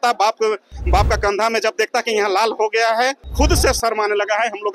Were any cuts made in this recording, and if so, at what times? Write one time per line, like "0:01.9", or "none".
0:03.3